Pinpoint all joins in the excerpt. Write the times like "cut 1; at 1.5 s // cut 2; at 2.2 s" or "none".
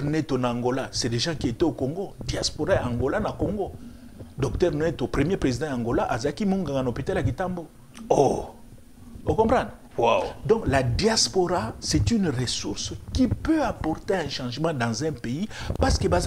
none